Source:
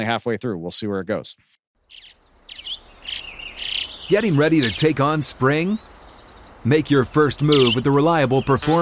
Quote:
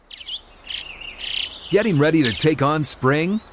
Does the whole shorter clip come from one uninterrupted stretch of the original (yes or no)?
yes